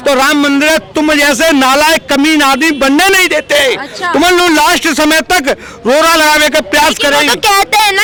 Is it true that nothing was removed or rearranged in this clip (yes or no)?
yes